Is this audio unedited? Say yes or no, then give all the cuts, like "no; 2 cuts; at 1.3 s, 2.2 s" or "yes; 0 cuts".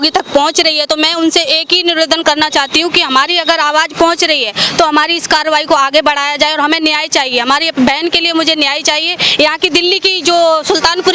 yes; 0 cuts